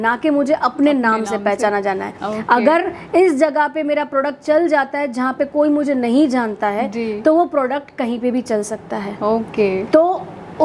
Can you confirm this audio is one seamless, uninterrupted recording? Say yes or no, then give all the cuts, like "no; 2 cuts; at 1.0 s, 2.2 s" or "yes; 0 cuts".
yes; 0 cuts